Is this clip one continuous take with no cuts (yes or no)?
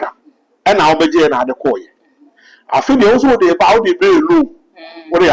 yes